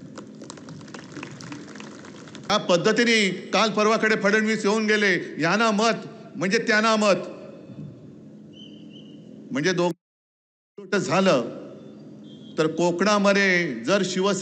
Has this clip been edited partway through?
yes; 1 cut; at 2.5 s

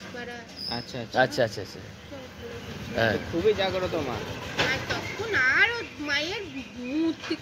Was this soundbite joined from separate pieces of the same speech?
no; 0 cuts

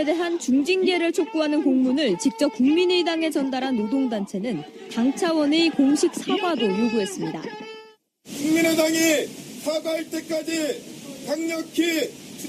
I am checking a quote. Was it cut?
no; 0 cuts

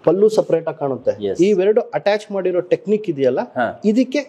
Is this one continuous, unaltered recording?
yes; 0 cuts

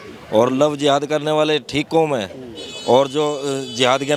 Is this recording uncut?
yes; 0 cuts

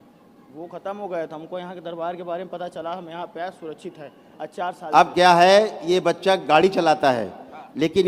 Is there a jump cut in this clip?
no; 0 cuts

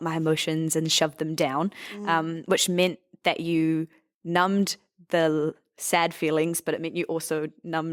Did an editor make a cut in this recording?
no; 0 cuts

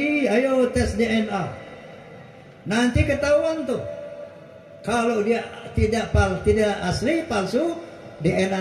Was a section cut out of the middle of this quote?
no; 0 cuts

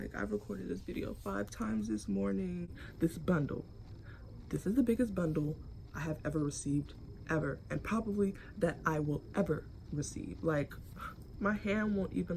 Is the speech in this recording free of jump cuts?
no; 1 cut; at 2.8 s

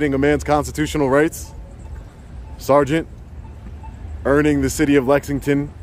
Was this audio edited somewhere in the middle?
no; 0 cuts

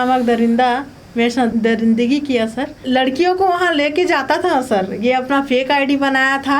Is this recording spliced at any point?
yes; 1 cut; at 2.8 s

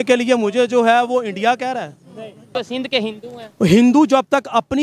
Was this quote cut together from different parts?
yes; 1 cut; at 2.5 s

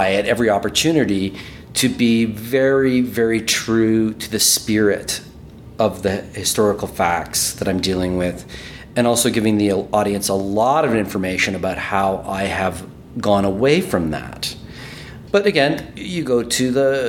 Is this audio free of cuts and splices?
yes; 0 cuts

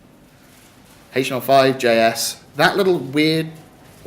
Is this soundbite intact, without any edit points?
no; 1 cut; at 1.5 s

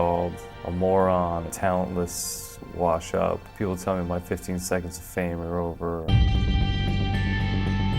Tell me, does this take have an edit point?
no; 0 cuts

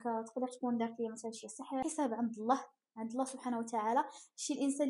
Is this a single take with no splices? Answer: no; 1 cut; at 1.8 s

